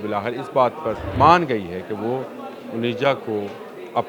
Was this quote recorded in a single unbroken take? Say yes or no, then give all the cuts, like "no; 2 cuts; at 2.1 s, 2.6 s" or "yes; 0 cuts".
no; 1 cut; at 1.1 s